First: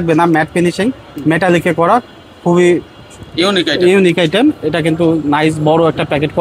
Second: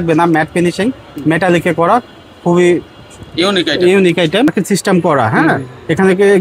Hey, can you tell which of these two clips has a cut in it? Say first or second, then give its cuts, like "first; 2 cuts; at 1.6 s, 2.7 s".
second; 1 cut; at 4.5 s